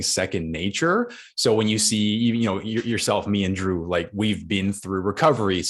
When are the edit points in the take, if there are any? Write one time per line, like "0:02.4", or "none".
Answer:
none